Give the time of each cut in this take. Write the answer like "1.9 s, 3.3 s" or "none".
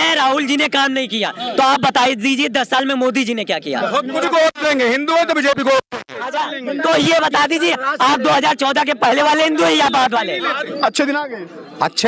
4.2 s, 10.7 s